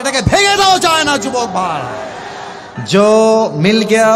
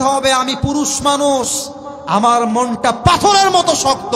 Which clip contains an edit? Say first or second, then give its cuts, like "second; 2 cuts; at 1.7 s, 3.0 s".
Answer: first; 1 cut; at 2.7 s